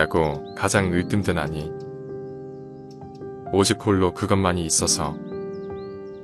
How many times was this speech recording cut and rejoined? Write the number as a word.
three